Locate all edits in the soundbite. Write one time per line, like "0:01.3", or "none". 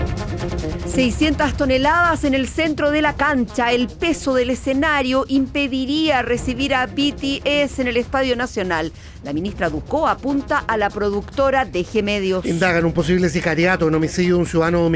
0:01.0